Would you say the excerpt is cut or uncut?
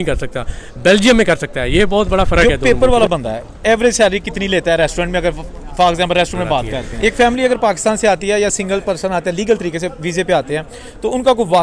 cut